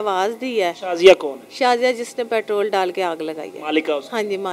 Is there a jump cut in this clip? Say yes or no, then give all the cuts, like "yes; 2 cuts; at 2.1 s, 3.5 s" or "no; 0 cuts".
no; 0 cuts